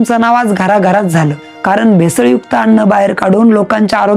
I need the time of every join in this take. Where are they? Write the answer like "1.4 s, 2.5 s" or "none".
1.5 s